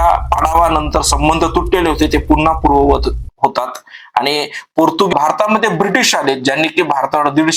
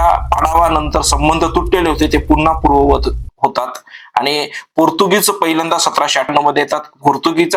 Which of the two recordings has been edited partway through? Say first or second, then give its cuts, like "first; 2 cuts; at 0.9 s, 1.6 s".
first; 1 cut; at 5.1 s